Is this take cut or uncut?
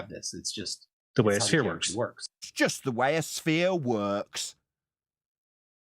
cut